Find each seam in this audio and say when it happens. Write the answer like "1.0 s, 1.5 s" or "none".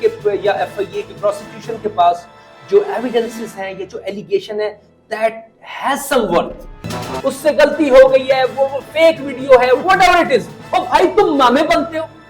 7.1 s